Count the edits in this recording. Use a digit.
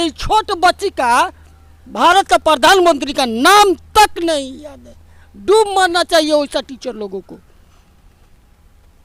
0